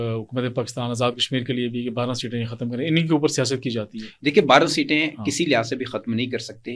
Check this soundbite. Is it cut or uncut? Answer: uncut